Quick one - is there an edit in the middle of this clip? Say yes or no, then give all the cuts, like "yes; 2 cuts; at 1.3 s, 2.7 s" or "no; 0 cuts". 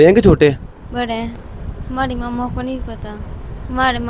yes; 1 cut; at 1.4 s